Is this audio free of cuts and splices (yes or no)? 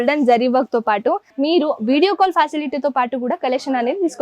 no